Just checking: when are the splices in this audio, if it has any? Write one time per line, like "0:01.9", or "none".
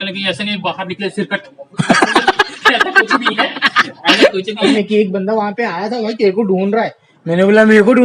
0:04.8